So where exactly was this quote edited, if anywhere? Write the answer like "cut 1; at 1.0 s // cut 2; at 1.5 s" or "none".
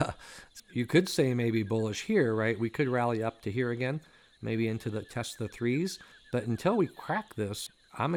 none